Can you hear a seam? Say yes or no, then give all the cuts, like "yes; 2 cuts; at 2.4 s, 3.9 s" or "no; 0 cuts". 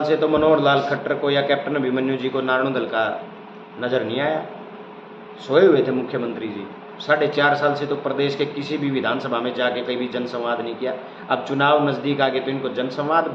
no; 0 cuts